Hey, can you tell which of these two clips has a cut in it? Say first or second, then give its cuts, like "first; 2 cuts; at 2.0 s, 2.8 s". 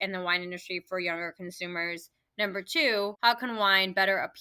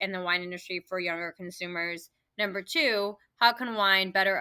first; 1 cut; at 3.2 s